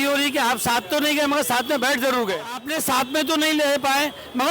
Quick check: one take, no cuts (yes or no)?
no